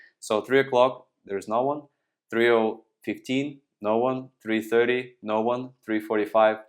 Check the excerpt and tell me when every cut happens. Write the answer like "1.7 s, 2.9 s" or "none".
none